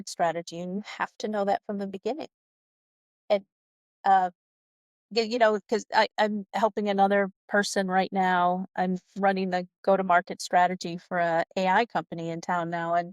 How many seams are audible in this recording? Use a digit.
0